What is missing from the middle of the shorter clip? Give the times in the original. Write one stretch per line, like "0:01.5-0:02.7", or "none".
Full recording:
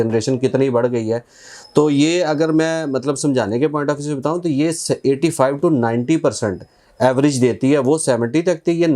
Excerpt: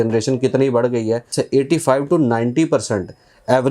0:01.3-0:04.8